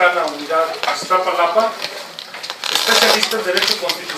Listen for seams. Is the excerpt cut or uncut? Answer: cut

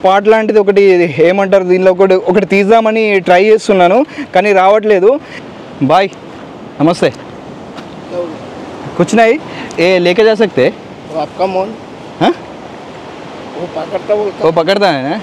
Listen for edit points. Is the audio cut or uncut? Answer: cut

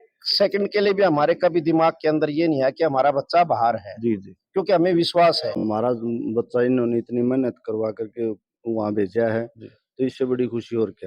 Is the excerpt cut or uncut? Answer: cut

